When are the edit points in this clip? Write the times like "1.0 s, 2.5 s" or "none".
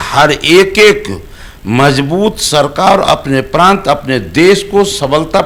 none